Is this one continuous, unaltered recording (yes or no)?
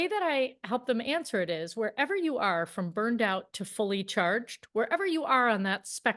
yes